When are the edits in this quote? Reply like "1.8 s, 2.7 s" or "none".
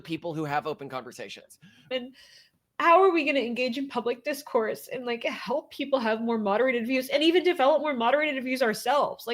1.9 s